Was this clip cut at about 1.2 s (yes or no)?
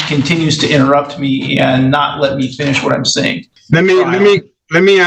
no